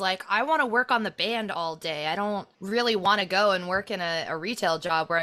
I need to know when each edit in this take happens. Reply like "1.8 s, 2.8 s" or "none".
none